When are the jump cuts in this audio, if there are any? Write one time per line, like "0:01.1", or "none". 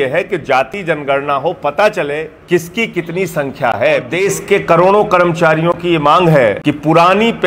0:02.4
0:04.1
0:06.6